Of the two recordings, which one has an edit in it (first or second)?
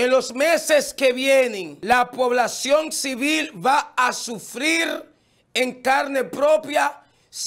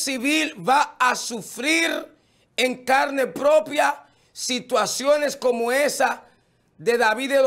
first